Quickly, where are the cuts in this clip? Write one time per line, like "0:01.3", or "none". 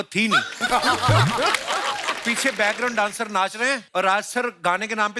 0:02.2
0:03.8